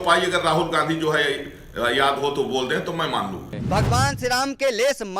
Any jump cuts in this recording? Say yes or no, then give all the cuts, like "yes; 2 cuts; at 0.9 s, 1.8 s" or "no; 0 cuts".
yes; 1 cut; at 3.5 s